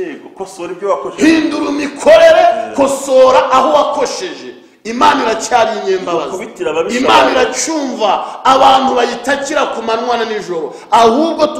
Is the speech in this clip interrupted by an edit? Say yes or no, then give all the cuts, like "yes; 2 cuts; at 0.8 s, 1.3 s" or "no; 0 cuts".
no; 0 cuts